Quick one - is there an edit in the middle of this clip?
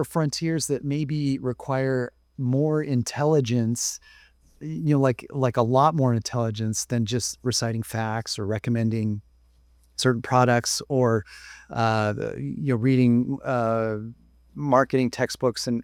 no; 0 cuts

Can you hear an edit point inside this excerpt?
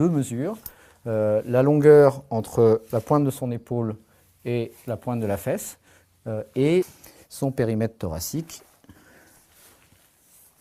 yes; 1 cut; at 7.5 s

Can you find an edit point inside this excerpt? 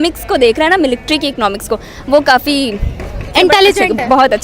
yes; 1 cut; at 3.3 s

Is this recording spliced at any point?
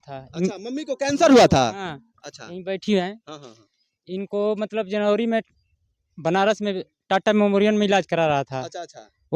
no; 0 cuts

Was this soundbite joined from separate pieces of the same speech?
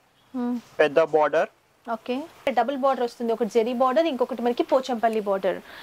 yes; 1 cut; at 2.4 s

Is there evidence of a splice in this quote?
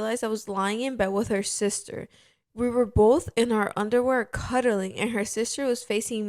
no; 0 cuts

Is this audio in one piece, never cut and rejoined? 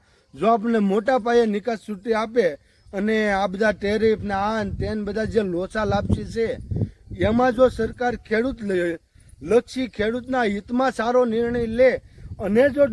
yes; 0 cuts

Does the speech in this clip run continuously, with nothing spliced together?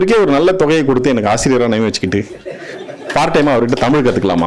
yes; 0 cuts

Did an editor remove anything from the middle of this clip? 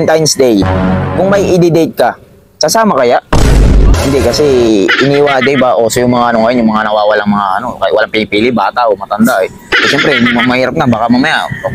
yes; 1 cut; at 3.9 s

